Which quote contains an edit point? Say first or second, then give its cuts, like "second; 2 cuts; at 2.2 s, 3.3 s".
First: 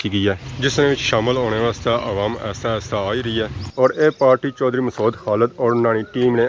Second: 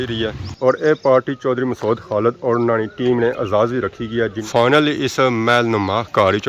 second; 1 cut; at 4.5 s